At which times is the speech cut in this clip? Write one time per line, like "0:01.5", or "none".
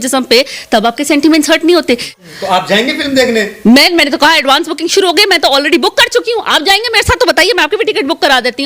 0:02.1